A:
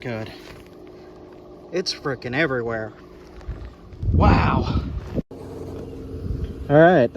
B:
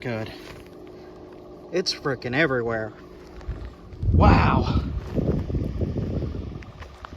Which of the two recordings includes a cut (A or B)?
A